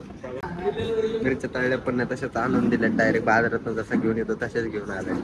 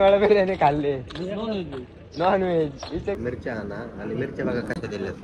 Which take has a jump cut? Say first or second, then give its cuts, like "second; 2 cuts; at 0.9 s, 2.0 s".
second; 1 cut; at 3.2 s